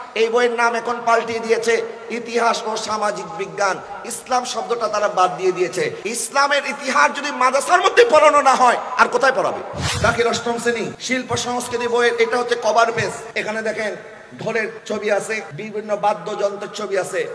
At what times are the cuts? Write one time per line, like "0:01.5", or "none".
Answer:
0:06.0
0:09.8
0:11.0
0:13.2
0:14.8
0:15.5